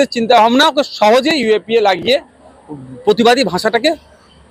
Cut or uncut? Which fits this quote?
uncut